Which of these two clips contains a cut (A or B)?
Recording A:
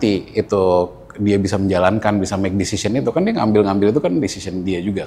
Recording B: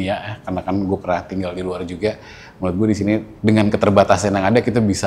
B